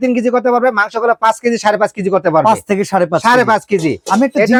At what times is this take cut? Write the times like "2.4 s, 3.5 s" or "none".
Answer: none